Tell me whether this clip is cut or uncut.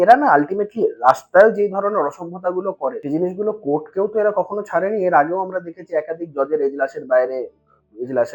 cut